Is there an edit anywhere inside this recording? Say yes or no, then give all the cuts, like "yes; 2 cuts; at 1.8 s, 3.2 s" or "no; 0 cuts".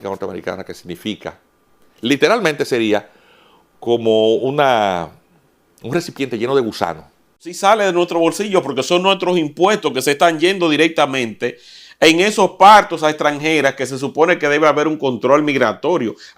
yes; 1 cut; at 7.5 s